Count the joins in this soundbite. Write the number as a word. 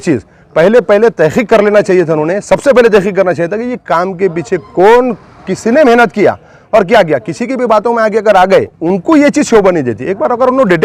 one